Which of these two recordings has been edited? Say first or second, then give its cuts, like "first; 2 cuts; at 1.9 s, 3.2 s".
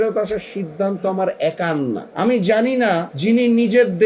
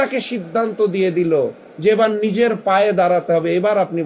first; 2 cuts; at 2.1 s, 3.1 s